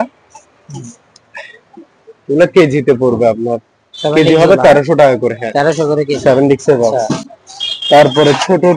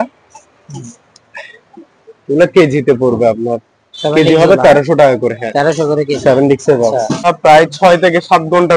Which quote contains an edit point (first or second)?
second